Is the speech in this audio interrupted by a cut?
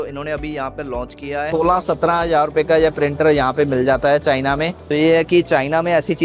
yes; 2 cuts; at 1.5 s, 4.8 s

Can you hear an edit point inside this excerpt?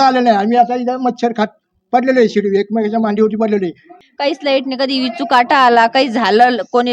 yes; 1 cut; at 3.9 s

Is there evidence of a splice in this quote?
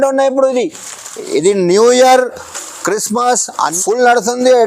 yes; 1 cut; at 3.7 s

